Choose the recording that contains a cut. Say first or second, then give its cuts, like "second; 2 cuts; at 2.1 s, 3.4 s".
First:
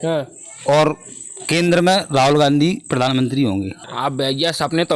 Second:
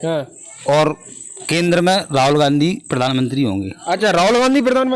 first; 1 cut; at 3.7 s